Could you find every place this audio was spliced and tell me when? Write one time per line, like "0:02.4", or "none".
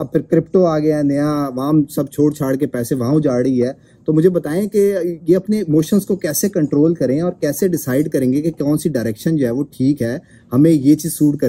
none